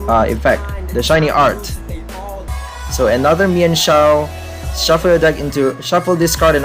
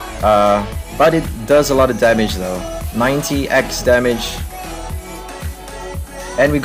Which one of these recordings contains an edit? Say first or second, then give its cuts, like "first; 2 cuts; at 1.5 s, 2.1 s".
first; 1 cut; at 2.4 s